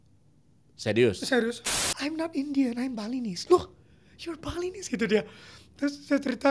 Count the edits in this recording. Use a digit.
1